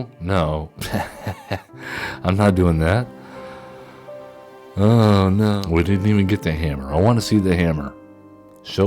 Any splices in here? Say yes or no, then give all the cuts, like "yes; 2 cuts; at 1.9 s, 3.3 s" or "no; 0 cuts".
yes; 1 cut; at 5.6 s